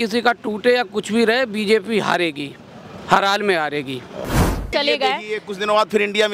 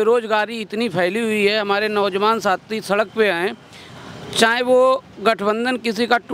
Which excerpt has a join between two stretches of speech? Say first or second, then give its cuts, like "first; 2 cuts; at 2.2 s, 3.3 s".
first; 1 cut; at 4.6 s